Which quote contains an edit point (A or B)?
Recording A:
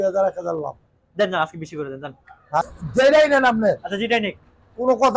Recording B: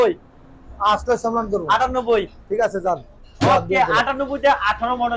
A